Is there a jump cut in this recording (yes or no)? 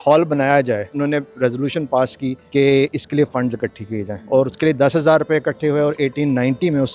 yes